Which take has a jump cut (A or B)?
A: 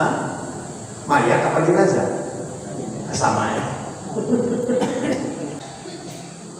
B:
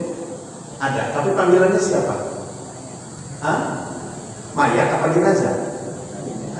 A